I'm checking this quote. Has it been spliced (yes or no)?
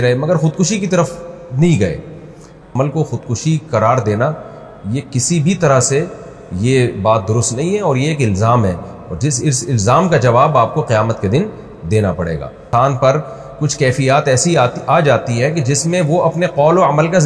yes